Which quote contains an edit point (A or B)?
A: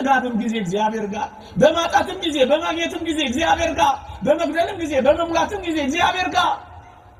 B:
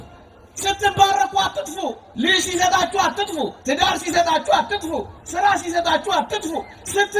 B